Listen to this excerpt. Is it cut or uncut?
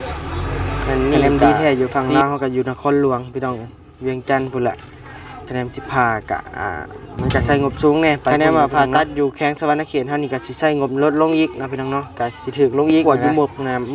cut